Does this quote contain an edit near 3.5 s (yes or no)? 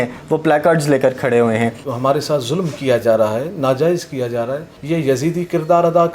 no